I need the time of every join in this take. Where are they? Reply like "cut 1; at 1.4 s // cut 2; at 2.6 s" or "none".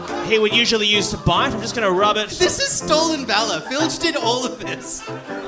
none